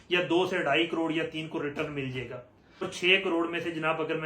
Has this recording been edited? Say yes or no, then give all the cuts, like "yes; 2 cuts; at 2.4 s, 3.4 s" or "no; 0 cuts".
yes; 1 cut; at 2.9 s